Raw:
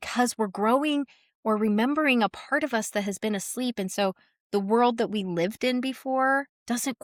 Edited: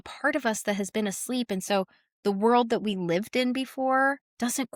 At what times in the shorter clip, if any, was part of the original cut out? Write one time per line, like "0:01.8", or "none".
none